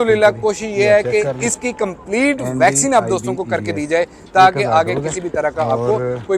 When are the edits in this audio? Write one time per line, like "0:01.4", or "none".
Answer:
none